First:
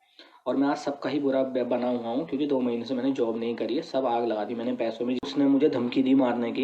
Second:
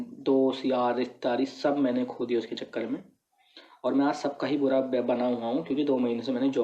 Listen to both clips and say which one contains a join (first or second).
first